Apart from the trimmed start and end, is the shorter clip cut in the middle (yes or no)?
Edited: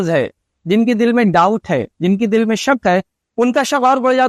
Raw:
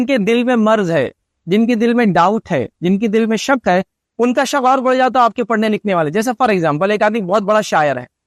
no